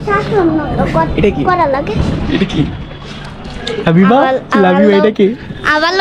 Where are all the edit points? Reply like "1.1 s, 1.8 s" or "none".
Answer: none